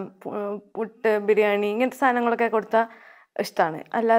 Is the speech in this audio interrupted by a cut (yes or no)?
no